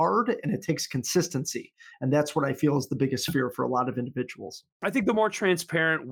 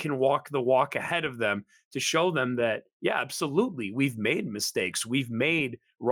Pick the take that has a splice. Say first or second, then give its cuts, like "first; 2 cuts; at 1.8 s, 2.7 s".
first; 1 cut; at 4.6 s